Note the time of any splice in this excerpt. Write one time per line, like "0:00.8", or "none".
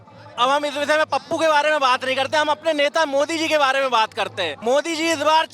0:04.5